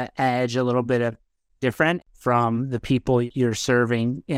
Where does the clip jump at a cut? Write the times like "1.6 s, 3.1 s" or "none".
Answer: 2.0 s, 3.2 s